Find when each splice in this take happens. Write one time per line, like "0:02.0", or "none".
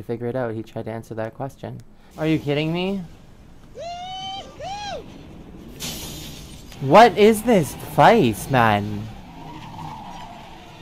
0:06.7

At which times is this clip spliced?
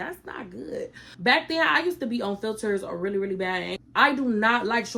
0:01.0
0:03.8

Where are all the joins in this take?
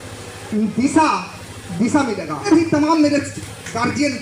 0:02.4

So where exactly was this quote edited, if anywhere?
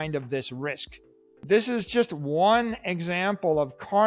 none

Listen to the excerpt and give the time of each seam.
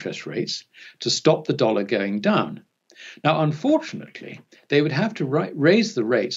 none

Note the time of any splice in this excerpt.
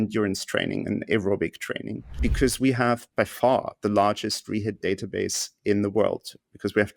0:02.2
0:03.1

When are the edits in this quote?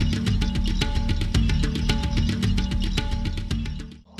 none

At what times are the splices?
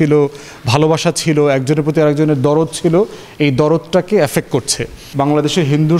0:05.0

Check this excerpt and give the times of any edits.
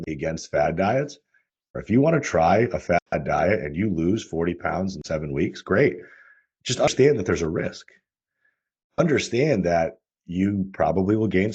0:01.7

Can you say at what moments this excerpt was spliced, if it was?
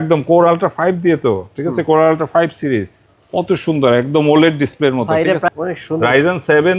0:05.4

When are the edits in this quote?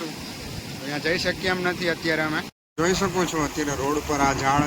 0:02.6

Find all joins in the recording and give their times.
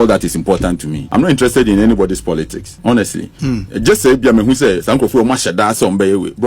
0:00.9
0:02.6

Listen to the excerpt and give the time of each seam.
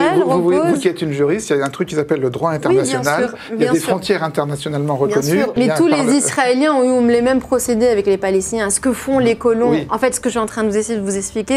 0:05.5

